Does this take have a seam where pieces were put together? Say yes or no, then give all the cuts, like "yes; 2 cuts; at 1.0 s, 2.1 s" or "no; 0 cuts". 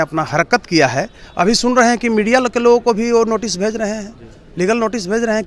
no; 0 cuts